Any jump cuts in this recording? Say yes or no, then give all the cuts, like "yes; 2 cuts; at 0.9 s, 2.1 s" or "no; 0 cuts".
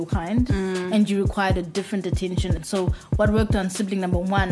yes; 1 cut; at 2.6 s